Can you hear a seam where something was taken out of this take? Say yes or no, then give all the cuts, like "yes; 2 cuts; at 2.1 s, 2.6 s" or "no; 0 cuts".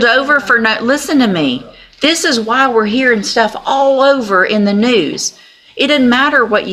no; 0 cuts